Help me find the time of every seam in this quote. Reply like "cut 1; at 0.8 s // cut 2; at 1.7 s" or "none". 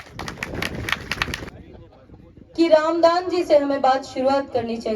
cut 1; at 1.5 s